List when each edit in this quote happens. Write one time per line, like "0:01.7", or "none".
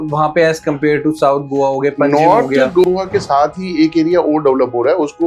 0:02.9